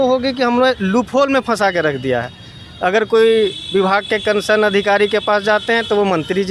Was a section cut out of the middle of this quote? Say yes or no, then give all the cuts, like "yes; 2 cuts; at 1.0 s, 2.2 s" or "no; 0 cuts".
no; 0 cuts